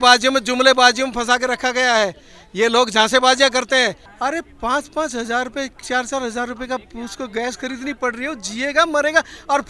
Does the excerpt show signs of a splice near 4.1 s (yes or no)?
yes